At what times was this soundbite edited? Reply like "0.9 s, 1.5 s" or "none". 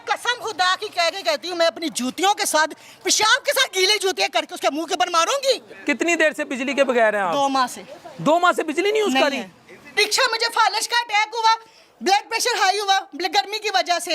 5.7 s, 10.0 s